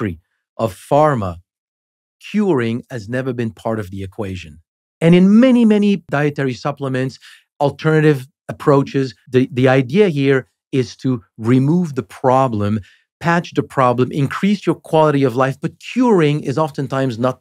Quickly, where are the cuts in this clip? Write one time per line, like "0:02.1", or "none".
0:06.0
0:09.2